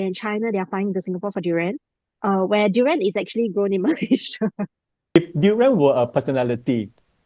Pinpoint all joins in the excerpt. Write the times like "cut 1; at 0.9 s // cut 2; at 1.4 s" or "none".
cut 1; at 5.2 s